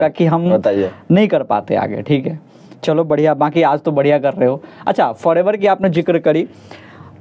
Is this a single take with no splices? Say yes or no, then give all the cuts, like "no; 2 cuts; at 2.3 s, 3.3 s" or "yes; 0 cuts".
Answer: yes; 0 cuts